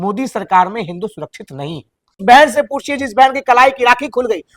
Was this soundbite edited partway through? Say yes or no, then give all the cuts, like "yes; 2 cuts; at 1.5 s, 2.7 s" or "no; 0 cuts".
yes; 1 cut; at 2.1 s